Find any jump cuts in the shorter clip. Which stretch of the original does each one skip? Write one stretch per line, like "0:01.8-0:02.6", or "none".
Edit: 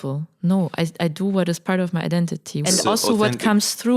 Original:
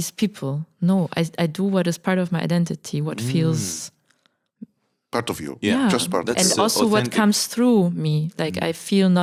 0:03.0-0:06.4

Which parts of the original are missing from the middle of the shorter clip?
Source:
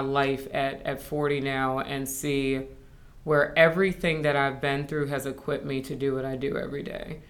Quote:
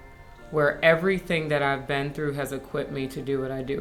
none

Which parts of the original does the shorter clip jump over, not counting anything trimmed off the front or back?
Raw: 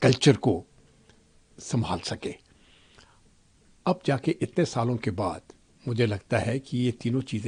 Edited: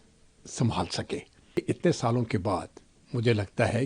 0:02.7-0:04.3

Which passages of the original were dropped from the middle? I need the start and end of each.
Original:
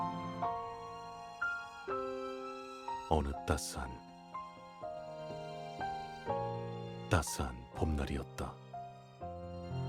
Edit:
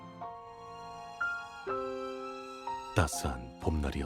0:03.0-0:07.0

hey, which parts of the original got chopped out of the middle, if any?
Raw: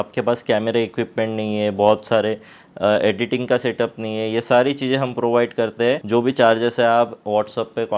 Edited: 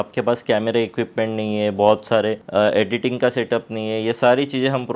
0:02.4-0:02.7

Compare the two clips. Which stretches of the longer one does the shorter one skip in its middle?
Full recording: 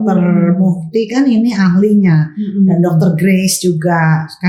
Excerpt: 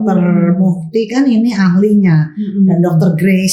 none

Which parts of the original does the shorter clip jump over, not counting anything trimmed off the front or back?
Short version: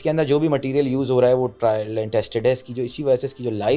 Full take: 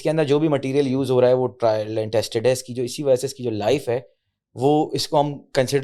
none

